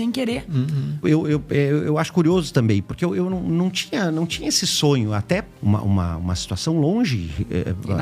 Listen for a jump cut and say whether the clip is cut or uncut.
cut